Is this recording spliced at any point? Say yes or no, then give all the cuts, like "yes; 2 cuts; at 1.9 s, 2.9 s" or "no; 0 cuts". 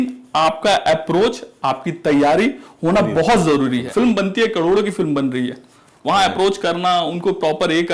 yes; 1 cut; at 3.9 s